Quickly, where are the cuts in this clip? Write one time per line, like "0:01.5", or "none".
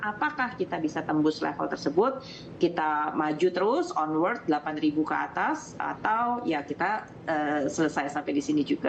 none